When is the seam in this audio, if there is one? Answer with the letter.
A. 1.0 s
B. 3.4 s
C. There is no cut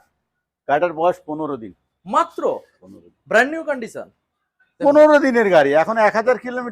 C